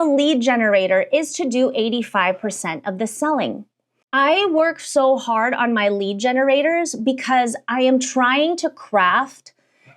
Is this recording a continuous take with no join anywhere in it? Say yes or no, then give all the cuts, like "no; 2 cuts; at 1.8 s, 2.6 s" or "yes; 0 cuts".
no; 1 cut; at 3.9 s